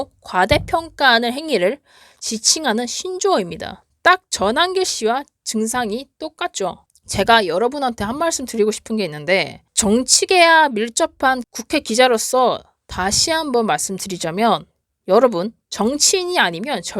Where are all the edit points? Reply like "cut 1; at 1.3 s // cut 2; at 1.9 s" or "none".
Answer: cut 1; at 6.8 s // cut 2; at 9.7 s